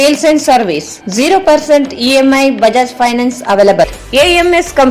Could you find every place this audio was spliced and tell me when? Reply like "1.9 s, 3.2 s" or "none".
3.9 s